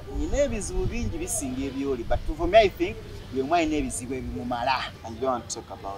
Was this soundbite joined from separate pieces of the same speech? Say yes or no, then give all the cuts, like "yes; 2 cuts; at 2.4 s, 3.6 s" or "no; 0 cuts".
yes; 1 cut; at 5.0 s